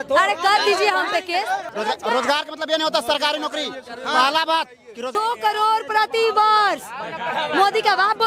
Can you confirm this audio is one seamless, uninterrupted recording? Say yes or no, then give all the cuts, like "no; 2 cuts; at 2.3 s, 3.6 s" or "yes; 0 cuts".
no; 2 cuts; at 1.7 s, 5.2 s